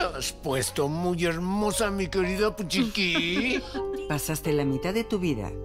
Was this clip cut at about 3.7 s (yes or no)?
yes